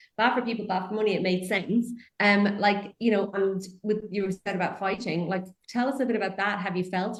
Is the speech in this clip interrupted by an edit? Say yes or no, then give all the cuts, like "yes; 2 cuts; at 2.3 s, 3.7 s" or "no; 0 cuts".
no; 0 cuts